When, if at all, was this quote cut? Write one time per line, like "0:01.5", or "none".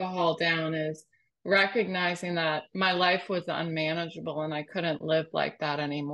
none